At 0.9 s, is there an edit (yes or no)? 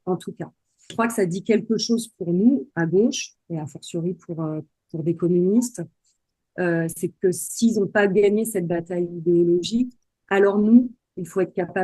yes